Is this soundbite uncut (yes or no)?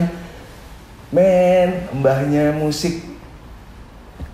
yes